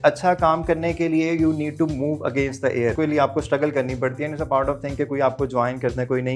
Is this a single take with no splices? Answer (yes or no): no